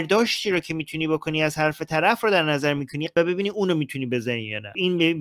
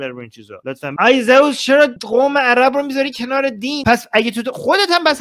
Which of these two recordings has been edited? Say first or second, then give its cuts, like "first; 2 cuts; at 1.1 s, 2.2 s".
second; 3 cuts; at 0.9 s, 2.0 s, 3.8 s